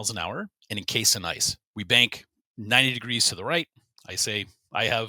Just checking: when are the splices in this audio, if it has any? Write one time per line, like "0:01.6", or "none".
0:01.6